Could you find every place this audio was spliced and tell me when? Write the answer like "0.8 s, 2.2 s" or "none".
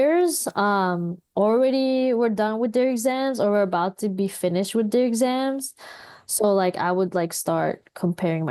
none